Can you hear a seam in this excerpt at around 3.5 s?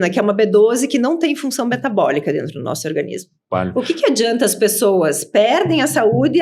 yes; 1 cut; at 3.5 s

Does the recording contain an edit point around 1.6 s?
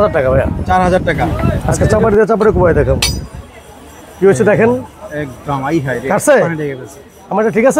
yes; 1 cut; at 1.6 s

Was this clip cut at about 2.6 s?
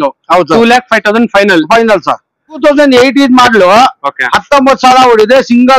yes; 1 cut; at 2.6 s

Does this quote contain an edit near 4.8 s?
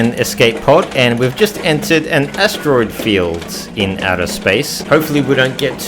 yes; 1 cut; at 4.8 s

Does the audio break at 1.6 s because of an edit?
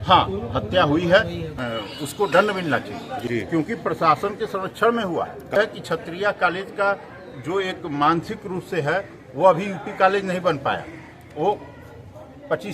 yes; 3 cuts; at 1.6 s, 3.1 s, 5.6 s

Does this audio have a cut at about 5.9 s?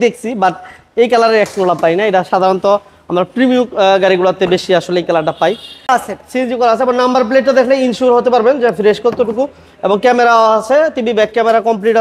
yes; 1 cut; at 5.9 s

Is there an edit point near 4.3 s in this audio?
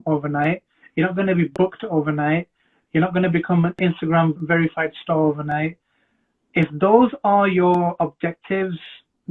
yes; 1 cut; at 4.3 s

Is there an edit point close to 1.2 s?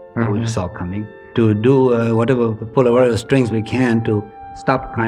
yes; 1 cut; at 1.2 s

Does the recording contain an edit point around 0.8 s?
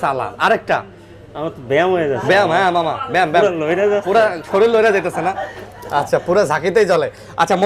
no; 0 cuts

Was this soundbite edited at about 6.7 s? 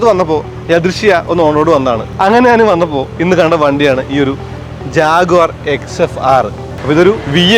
yes; 2 cuts; at 2.1 s, 6.7 s

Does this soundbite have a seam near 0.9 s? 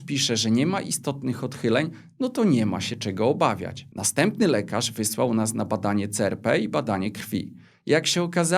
no; 1 cut; at 3.9 s

